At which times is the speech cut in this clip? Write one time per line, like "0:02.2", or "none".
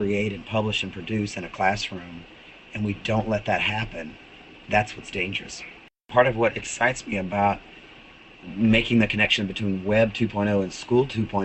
0:06.1